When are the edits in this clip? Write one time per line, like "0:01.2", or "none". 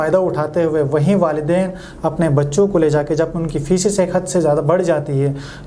none